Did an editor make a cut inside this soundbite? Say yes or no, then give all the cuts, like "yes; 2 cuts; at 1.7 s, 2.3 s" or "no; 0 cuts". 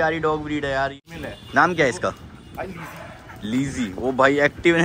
yes; 1 cut; at 1.0 s